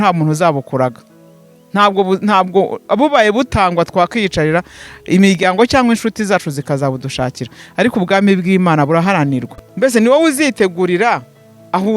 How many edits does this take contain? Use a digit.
1